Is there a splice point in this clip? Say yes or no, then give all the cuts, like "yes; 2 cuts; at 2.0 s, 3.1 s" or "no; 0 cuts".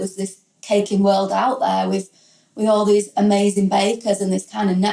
no; 0 cuts